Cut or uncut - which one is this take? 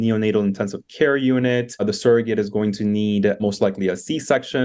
cut